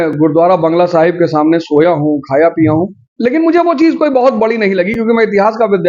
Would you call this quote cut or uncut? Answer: uncut